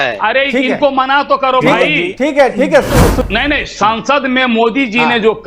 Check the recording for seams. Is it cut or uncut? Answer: cut